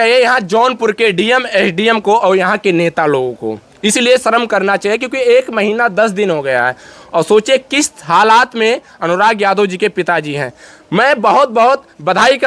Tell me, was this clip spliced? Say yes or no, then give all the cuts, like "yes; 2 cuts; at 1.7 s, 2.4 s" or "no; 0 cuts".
no; 0 cuts